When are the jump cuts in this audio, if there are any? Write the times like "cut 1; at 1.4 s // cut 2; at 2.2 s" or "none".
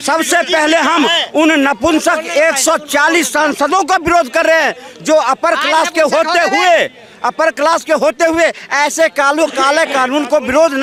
none